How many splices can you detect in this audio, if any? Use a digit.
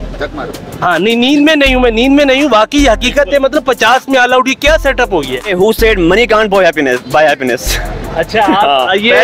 1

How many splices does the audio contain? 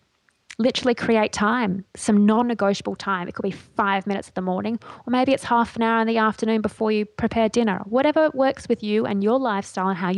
0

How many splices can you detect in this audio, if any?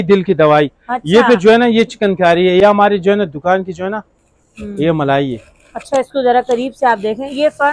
0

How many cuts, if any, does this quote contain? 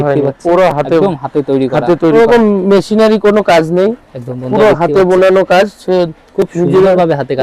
1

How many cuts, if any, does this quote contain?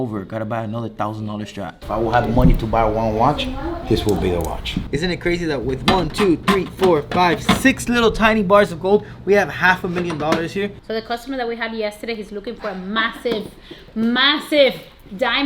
3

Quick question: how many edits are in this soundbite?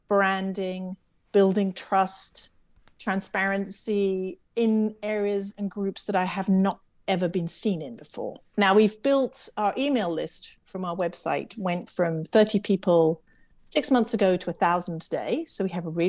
1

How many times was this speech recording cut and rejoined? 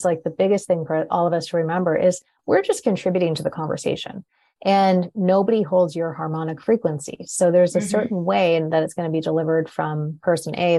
1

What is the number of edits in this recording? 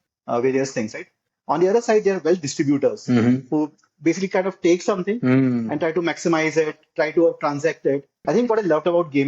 1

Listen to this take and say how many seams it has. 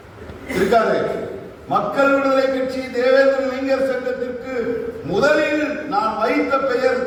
0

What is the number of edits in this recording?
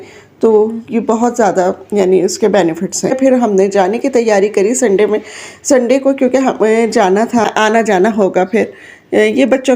2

